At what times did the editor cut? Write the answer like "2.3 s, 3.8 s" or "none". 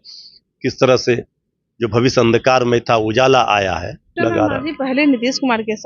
4.2 s